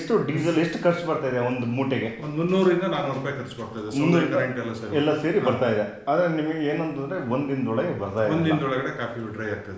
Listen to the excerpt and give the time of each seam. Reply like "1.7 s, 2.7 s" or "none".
none